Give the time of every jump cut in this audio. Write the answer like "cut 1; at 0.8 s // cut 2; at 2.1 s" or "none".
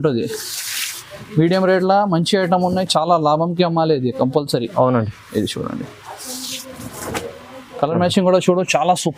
none